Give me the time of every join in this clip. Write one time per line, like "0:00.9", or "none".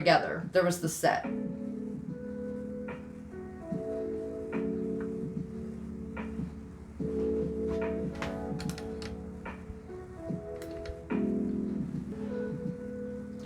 0:12.1